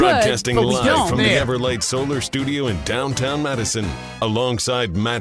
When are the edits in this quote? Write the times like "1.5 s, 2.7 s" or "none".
1.4 s